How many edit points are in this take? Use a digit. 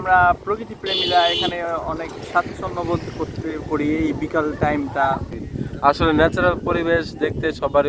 1